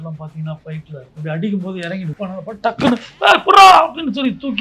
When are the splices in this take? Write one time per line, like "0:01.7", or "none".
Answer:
0:01.0
0:02.2